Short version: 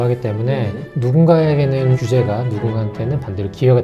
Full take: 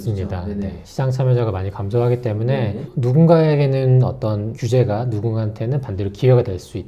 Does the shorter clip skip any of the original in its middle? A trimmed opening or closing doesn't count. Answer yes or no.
yes